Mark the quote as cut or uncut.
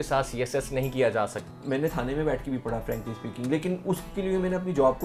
cut